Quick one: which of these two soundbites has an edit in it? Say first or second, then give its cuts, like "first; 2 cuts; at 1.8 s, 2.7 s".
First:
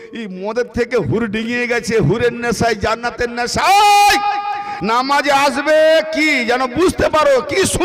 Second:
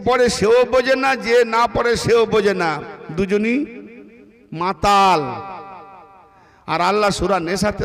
first; 1 cut; at 4.7 s